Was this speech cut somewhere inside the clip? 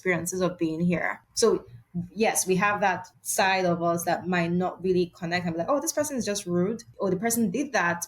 yes; 3 cuts; at 1.2 s, 3.1 s, 6.9 s

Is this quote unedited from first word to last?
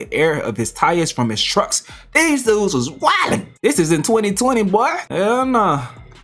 no; 1 cut; at 5.0 s

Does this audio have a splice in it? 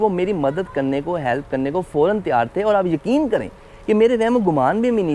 no; 0 cuts

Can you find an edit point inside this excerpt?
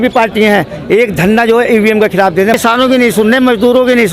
yes; 1 cut; at 2.6 s

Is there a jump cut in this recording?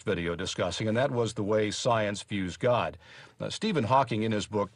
yes; 1 cut; at 2.1 s

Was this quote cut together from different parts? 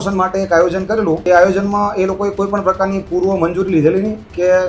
yes; 1 cut; at 1.2 s

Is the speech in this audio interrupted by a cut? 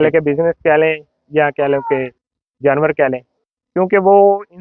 no; 0 cuts

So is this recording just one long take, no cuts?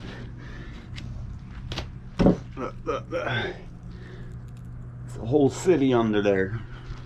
yes; 0 cuts

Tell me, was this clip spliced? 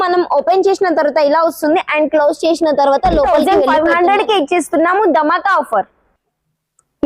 yes; 1 cut; at 3.4 s

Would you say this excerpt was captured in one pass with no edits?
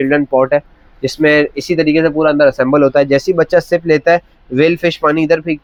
yes; 0 cuts

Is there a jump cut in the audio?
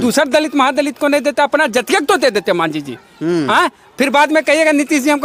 no; 0 cuts

